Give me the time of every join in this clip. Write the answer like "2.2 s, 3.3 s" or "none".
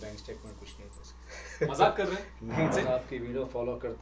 2.7 s